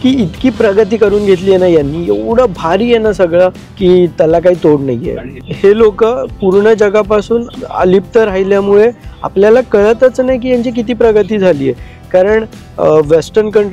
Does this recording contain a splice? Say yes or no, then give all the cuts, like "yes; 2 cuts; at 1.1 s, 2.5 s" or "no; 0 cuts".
no; 0 cuts